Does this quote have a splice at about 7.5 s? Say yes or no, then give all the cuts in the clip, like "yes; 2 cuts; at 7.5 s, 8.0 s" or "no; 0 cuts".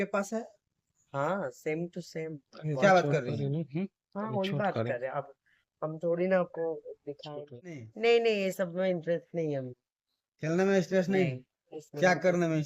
yes; 1 cut; at 7.5 s